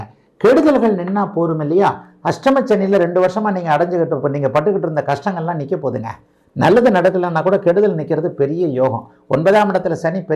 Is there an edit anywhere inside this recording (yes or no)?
no